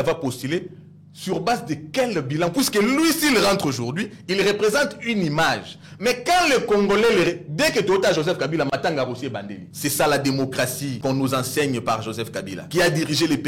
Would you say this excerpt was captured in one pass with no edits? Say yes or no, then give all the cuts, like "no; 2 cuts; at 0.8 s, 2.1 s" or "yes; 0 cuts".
no; 3 cuts; at 9.6 s, 10.9 s, 12.5 s